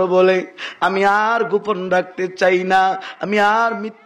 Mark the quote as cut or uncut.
uncut